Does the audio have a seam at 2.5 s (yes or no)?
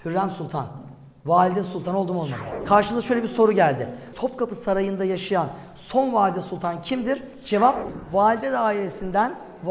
yes